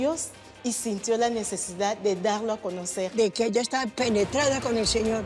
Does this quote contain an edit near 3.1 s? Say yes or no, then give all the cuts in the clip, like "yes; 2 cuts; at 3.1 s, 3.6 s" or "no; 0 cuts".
yes; 1 cut; at 3.1 s